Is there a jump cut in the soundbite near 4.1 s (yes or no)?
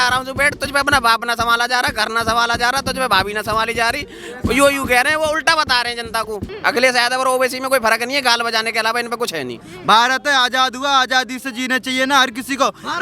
no